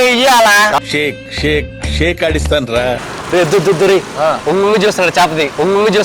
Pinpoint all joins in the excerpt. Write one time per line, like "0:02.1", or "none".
0:02.9